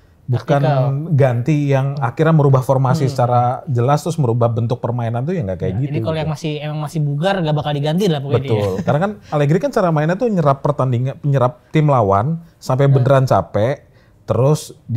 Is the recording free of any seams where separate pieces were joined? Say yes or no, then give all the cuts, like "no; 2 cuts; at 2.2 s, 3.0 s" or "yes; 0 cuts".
yes; 0 cuts